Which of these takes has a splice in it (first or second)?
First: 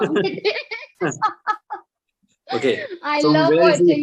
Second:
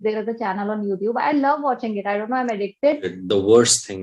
second